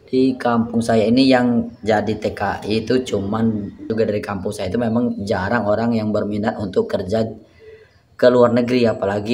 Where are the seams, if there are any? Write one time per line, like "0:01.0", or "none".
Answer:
0:03.9